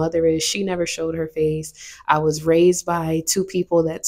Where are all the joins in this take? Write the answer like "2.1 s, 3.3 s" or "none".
none

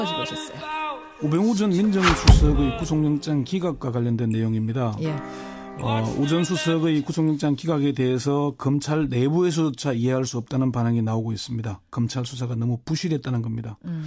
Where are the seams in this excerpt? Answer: none

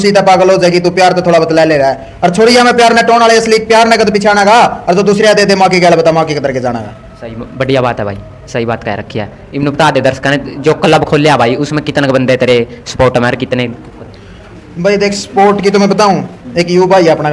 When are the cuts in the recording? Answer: none

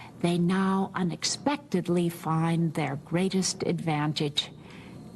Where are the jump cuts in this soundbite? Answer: none

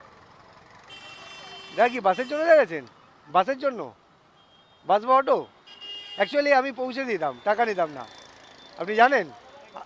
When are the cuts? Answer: none

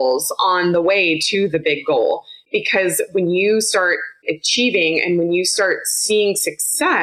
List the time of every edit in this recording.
none

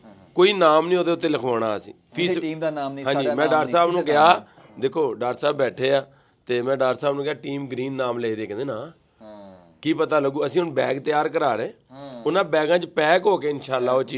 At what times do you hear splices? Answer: none

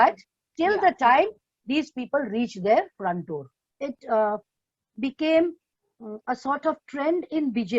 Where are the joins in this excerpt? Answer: 3.7 s

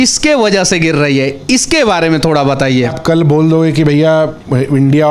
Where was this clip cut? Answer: 3.0 s

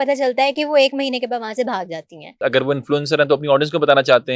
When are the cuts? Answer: 2.3 s

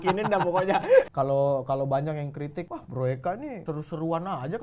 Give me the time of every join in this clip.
1.1 s, 2.8 s, 3.6 s

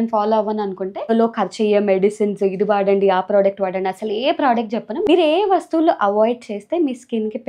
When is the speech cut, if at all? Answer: 1.1 s, 4.9 s

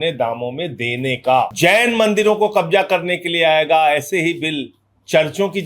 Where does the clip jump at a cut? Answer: 1.5 s

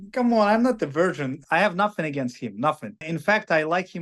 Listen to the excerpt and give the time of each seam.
1.4 s, 3.0 s

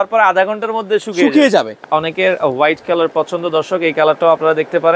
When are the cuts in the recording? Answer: 1.8 s

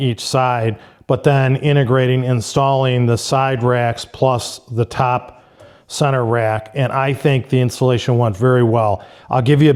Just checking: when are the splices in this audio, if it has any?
none

